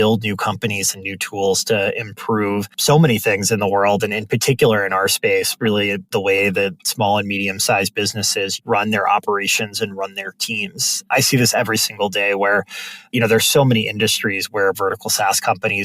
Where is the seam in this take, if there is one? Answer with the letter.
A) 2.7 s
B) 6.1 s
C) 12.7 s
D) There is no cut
A